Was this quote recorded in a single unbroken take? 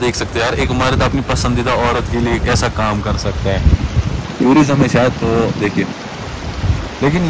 yes; 0 cuts

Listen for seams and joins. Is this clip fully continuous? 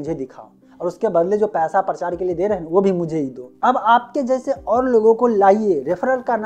no; 1 cut; at 3.4 s

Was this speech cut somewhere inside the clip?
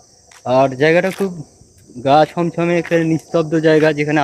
no; 0 cuts

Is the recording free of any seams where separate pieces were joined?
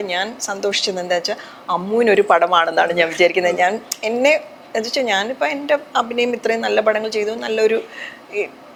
yes; 0 cuts

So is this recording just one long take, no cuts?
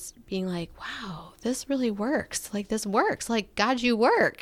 yes; 0 cuts

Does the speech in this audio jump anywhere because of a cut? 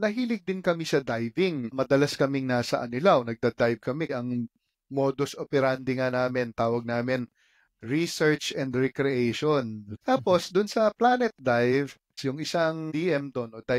yes; 4 cuts; at 4.1 s, 9.9 s, 12.1 s, 12.9 s

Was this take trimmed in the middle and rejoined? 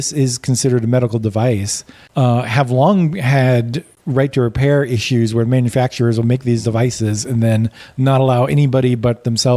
no; 0 cuts

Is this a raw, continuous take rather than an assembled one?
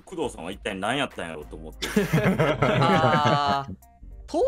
yes; 0 cuts

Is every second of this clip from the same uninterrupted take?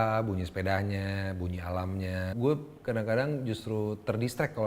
no; 1 cut; at 2.3 s

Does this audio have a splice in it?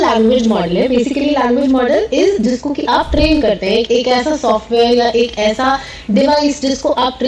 yes; 1 cut; at 3.9 s

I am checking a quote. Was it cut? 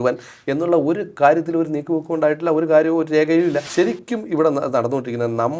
yes; 1 cut; at 3.6 s

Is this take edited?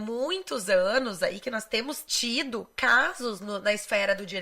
yes; 1 cut; at 2.1 s

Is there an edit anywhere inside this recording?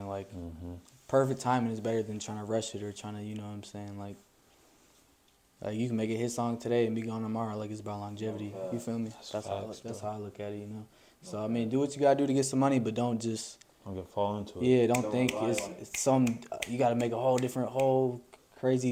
no; 0 cuts

